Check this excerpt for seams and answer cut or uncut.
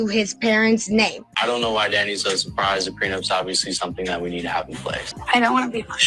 cut